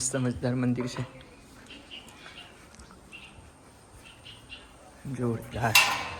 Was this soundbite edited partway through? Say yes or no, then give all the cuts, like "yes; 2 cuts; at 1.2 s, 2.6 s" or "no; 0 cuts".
no; 0 cuts